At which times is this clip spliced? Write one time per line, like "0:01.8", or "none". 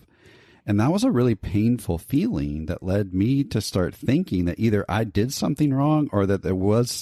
none